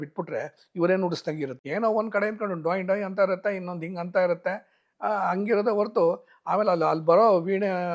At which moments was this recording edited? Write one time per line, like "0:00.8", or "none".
0:01.6

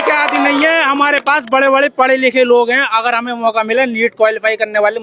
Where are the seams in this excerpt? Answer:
none

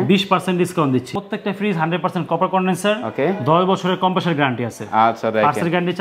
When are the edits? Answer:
0:01.1

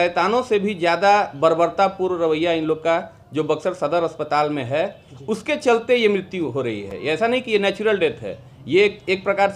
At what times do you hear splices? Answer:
none

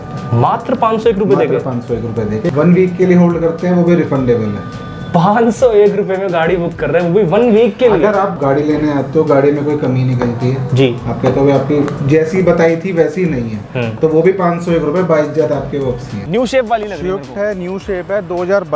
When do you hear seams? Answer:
0:02.5
0:16.2

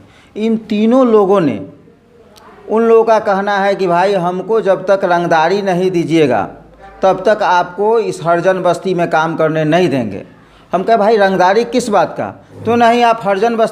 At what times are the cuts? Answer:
none

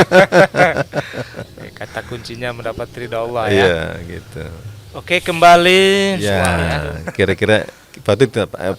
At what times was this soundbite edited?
0:06.4

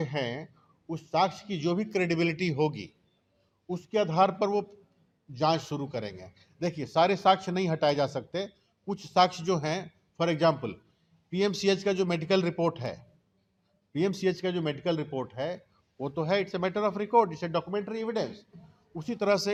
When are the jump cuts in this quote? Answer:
none

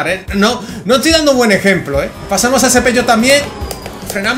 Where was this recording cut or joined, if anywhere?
0:02.2

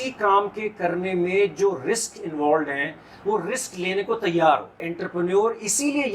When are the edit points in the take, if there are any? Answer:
0:05.0

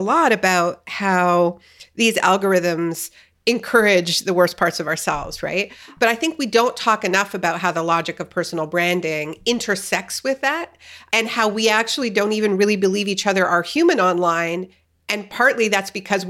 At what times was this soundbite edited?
0:05.9

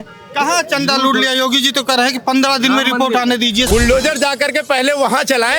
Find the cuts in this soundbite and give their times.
0:03.7

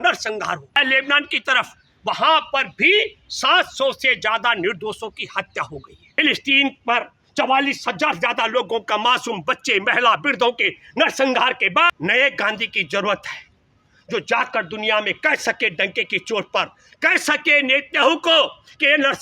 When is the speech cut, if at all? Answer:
0:00.8
0:06.0
0:11.9

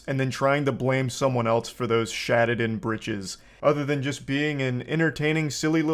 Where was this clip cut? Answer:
0:03.4

